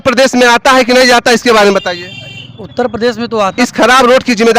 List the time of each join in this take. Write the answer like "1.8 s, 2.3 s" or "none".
3.5 s